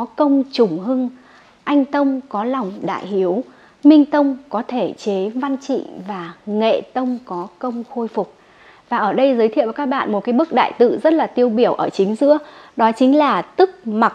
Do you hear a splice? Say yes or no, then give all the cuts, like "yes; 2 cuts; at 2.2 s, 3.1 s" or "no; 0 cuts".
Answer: no; 0 cuts